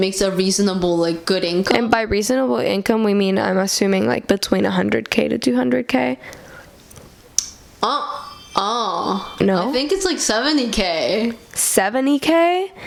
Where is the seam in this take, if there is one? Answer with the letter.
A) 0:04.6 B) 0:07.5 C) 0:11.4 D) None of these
D